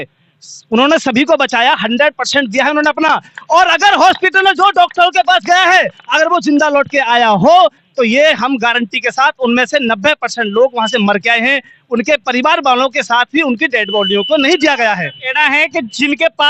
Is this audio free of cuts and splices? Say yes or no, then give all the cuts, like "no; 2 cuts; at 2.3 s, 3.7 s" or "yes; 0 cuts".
yes; 0 cuts